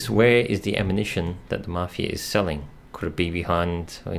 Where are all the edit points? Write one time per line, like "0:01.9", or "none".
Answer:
none